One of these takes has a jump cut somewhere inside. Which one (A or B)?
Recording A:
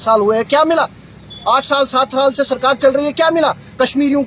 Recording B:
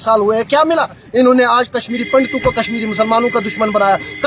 B